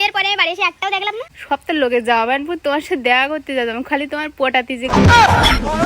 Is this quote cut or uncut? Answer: cut